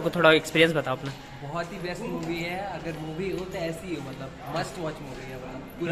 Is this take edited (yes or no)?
no